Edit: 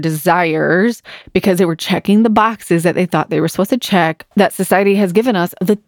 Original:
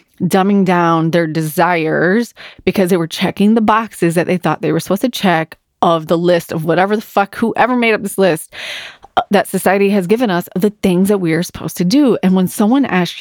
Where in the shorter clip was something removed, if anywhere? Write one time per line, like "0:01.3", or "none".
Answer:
0:04.3